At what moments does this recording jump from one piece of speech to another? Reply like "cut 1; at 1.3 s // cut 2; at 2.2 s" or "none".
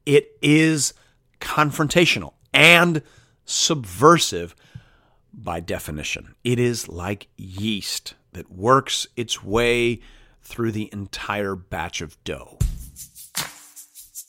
cut 1; at 12.5 s

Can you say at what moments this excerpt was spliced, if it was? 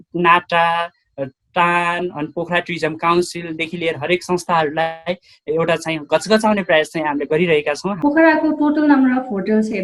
cut 1; at 7.9 s

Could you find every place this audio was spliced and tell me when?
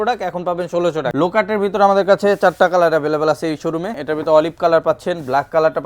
cut 1; at 1.1 s // cut 2; at 4.0 s

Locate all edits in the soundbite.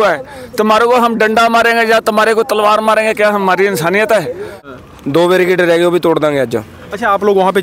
cut 1; at 4.7 s

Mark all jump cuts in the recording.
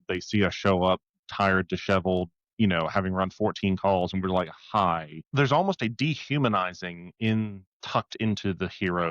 cut 1; at 5.2 s

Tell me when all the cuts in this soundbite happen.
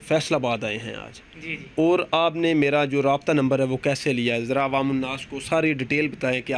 none

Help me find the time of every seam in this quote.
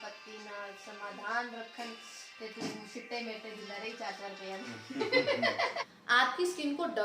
cut 1; at 5.9 s

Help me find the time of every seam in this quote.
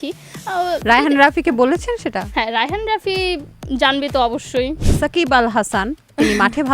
cut 1; at 4.8 s

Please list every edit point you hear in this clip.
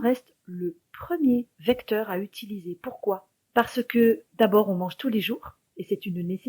cut 1; at 1.5 s // cut 2; at 3.3 s

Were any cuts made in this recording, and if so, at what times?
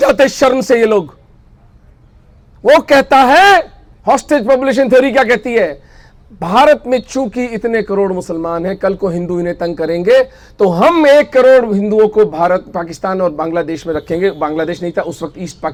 none

